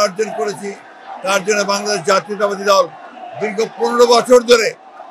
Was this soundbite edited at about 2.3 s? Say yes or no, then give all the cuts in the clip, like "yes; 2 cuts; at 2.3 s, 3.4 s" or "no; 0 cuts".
no; 0 cuts